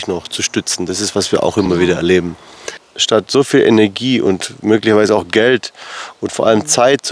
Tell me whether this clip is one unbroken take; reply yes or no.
no